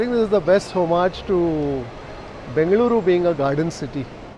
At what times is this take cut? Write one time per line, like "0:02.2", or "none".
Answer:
none